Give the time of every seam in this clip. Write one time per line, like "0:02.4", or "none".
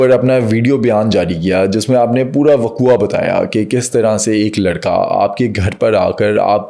none